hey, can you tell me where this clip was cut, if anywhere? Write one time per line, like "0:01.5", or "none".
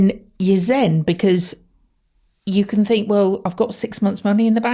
none